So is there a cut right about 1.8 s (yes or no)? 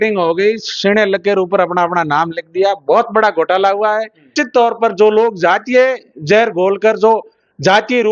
no